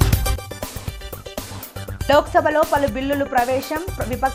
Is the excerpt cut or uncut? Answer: uncut